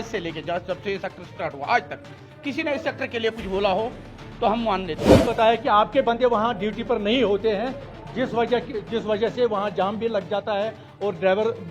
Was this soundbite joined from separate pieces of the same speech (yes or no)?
yes